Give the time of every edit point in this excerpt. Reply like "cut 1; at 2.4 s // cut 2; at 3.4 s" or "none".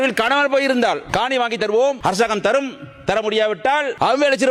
none